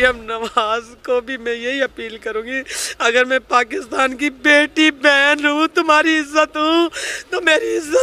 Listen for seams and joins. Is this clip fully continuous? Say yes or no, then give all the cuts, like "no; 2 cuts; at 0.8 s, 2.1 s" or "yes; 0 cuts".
yes; 0 cuts